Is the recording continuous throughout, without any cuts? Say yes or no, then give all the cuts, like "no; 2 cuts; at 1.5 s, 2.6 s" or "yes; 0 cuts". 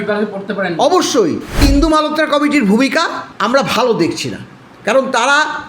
no; 2 cuts; at 1.6 s, 3.2 s